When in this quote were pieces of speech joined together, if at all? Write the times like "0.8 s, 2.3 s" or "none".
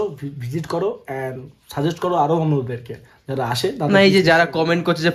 none